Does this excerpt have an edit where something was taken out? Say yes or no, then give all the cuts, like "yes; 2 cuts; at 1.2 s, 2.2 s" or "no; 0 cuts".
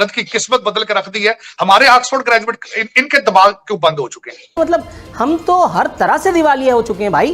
yes; 1 cut; at 4.5 s